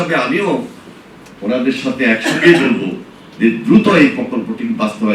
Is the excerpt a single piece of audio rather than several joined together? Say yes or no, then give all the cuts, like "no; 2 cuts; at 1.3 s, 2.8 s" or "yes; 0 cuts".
yes; 0 cuts